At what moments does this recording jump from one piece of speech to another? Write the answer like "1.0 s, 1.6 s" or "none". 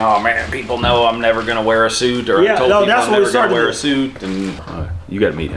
4.6 s